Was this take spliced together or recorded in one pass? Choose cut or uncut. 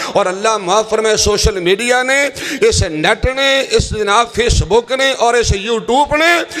uncut